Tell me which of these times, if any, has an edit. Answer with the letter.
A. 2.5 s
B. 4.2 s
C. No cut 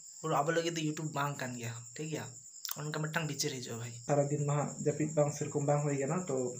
B